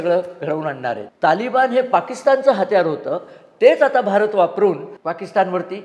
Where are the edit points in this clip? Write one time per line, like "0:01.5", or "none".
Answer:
0:01.1
0:04.9